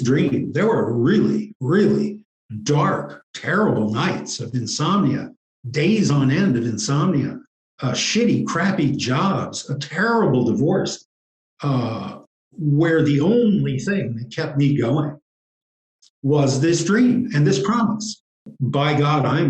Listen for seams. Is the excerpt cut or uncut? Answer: cut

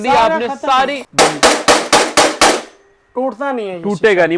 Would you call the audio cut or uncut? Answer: cut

